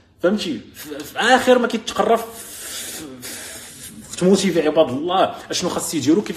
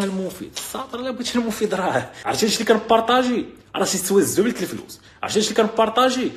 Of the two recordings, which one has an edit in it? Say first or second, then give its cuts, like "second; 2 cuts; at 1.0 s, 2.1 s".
second; 1 cut; at 2.2 s